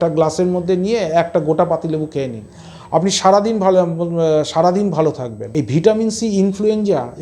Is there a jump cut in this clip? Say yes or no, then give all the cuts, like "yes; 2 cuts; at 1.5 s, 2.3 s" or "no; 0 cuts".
yes; 1 cut; at 5.3 s